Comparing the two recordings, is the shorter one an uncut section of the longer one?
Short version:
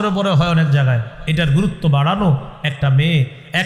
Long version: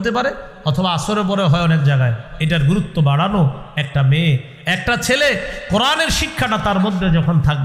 yes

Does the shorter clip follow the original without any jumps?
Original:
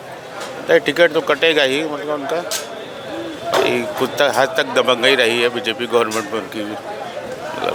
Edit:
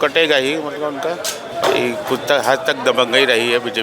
no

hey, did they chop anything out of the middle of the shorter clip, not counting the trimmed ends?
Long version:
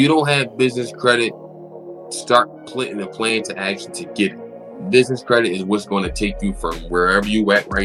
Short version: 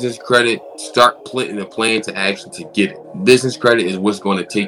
yes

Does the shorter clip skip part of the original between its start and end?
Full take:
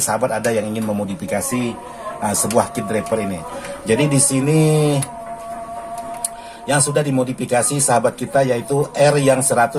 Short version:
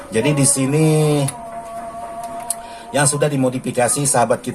no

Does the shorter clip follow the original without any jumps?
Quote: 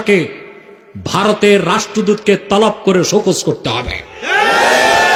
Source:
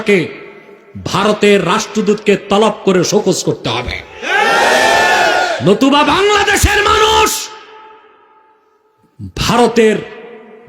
yes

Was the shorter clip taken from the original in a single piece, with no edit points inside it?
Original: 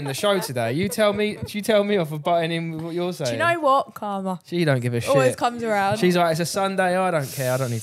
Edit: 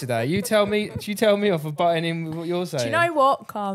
yes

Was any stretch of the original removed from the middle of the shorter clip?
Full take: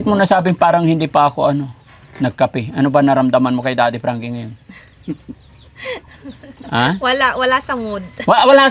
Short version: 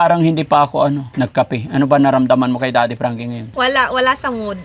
yes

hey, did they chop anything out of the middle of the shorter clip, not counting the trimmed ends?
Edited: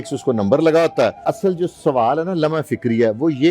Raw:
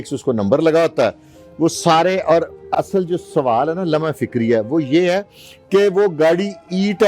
yes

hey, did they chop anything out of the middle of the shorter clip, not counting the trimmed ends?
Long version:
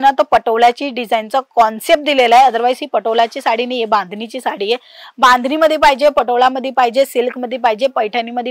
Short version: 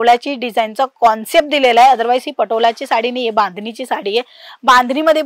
no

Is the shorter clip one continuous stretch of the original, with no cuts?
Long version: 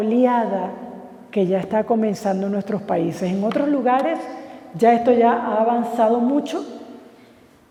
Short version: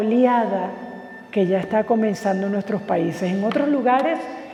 yes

